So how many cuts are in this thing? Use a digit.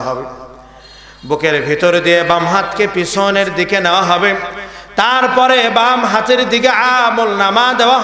0